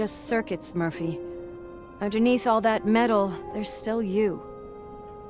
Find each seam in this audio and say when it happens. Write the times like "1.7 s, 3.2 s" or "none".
4.4 s